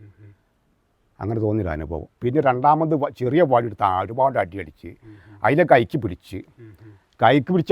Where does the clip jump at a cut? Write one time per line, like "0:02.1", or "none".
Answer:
0:02.1